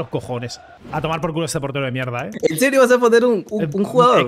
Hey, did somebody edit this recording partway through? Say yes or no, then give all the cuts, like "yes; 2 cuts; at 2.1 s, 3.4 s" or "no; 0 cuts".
yes; 2 cuts; at 0.8 s, 2.3 s